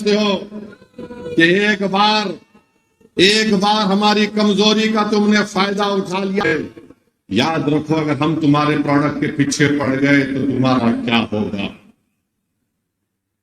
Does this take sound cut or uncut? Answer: cut